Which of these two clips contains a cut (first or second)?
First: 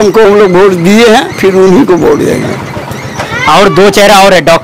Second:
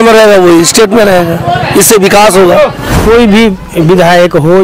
second